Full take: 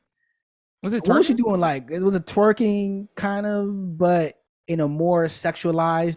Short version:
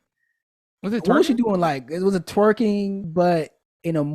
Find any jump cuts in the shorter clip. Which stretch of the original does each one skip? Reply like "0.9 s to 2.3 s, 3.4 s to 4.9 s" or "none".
3.1 s to 3.9 s